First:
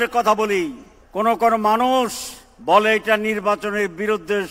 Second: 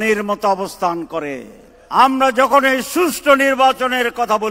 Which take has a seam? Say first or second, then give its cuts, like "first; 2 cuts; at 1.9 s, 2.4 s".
second; 1 cut; at 1.8 s